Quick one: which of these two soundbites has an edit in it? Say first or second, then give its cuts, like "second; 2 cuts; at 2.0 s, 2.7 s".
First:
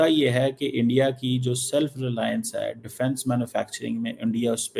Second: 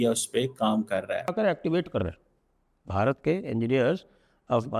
second; 1 cut; at 1.3 s